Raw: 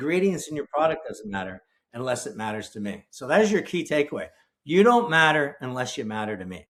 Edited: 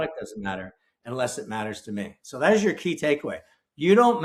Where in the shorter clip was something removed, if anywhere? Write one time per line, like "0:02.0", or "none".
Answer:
none